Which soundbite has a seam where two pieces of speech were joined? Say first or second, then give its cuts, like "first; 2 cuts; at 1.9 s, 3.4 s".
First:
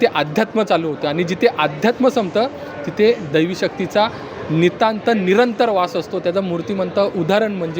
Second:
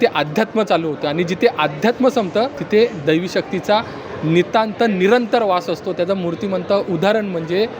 second; 1 cut; at 2.6 s